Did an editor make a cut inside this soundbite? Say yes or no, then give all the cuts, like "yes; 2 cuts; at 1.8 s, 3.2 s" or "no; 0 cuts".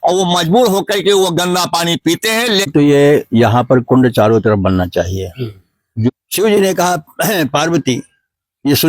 yes; 2 cuts; at 2.7 s, 6.1 s